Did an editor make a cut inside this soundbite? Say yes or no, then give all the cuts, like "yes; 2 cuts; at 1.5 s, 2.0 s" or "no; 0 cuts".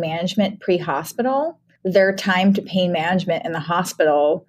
yes; 1 cut; at 1.7 s